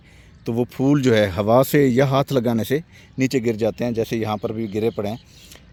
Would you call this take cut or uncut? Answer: uncut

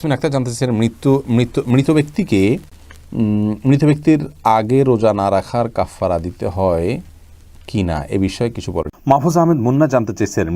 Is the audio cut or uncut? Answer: cut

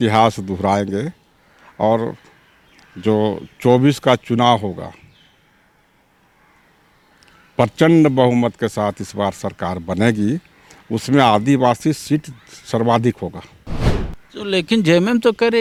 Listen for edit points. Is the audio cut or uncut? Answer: uncut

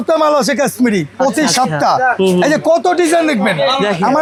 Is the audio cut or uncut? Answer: uncut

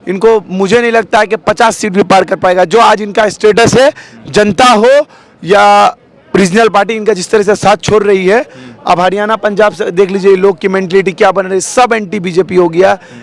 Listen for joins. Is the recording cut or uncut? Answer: uncut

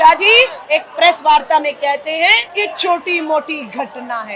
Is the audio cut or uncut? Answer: uncut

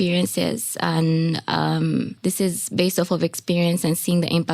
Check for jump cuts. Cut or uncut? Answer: cut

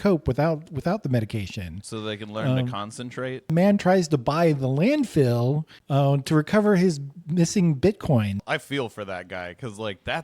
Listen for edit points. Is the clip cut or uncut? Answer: cut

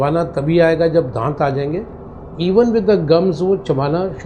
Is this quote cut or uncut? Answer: uncut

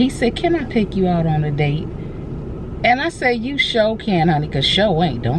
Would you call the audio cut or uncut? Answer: uncut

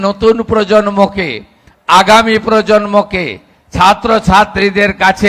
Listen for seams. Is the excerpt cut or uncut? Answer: uncut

